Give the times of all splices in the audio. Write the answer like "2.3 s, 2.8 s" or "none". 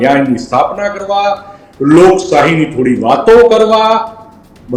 none